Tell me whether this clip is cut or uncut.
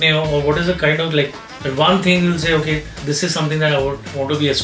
uncut